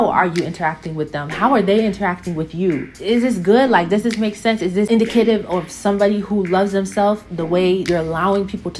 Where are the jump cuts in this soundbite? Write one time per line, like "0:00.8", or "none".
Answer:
0:04.9
0:07.8